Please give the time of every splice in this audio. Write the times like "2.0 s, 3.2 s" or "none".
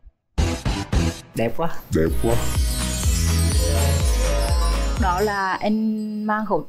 none